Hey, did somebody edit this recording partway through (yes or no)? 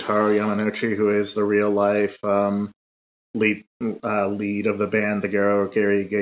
no